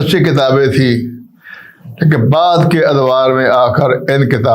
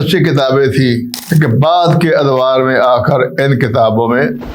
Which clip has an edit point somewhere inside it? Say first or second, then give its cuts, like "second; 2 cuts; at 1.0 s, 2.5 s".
second; 1 cut; at 1.1 s